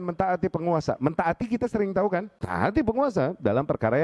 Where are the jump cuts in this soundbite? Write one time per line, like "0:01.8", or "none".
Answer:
0:02.4